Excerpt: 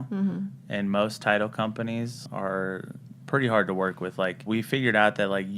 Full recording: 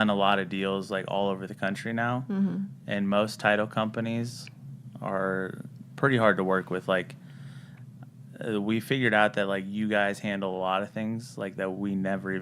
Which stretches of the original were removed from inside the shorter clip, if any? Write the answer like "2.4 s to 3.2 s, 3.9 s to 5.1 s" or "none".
4.4 s to 4.9 s, 7.2 s to 8.6 s